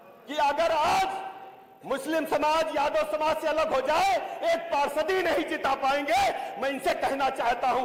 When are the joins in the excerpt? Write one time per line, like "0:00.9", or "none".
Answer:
none